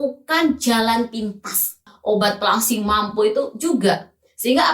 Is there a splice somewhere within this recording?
yes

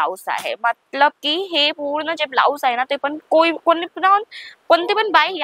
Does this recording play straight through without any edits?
yes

